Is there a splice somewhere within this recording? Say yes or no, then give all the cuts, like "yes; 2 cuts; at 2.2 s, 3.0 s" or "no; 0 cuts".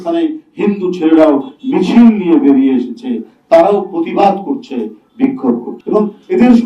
yes; 1 cut; at 5.7 s